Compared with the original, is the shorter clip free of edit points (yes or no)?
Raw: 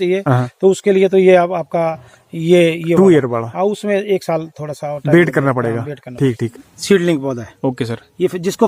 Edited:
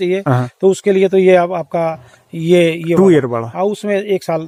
yes